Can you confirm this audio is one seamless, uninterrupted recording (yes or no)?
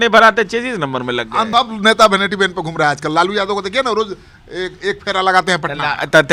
no